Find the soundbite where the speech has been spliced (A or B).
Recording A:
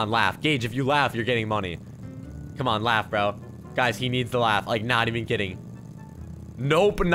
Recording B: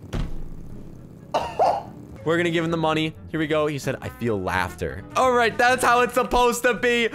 B